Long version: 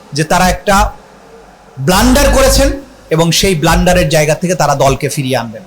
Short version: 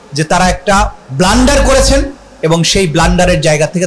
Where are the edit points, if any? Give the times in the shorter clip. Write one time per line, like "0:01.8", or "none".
0:01.0